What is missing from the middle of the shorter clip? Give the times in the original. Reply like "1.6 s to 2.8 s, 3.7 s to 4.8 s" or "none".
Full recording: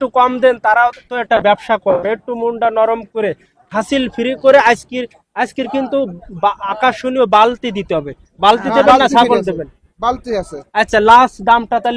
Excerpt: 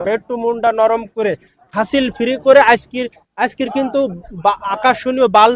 none